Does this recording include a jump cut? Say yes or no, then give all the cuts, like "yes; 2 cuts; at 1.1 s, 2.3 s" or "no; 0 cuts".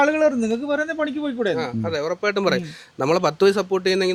no; 0 cuts